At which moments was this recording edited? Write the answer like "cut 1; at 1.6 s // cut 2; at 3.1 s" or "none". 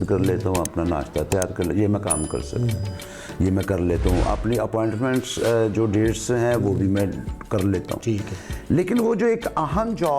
none

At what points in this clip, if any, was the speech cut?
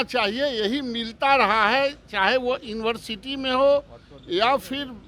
none

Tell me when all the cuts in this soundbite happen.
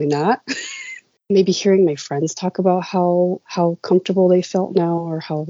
cut 1; at 1.1 s

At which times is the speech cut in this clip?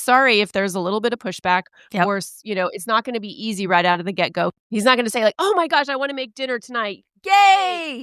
none

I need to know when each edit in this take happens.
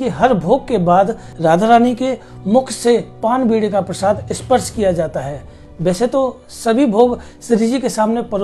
cut 1; at 1.2 s

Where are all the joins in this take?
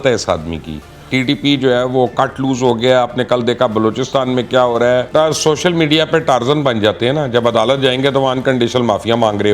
cut 1; at 1.1 s // cut 2; at 5.1 s

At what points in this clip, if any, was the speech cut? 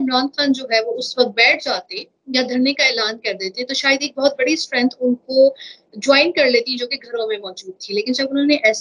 none

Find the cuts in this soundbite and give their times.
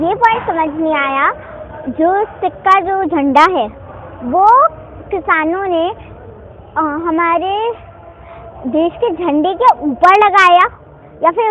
none

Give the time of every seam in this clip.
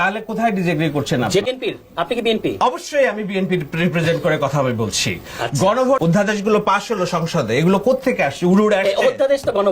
cut 1; at 1.4 s // cut 2; at 6.0 s

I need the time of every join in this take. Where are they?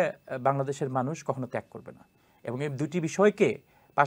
none

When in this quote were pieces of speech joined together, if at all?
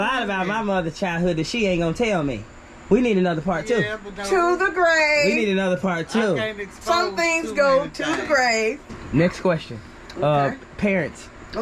cut 1; at 8.9 s

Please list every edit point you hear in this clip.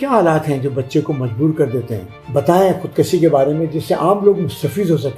cut 1; at 2.2 s

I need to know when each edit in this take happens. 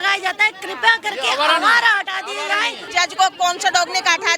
cut 1; at 2.8 s

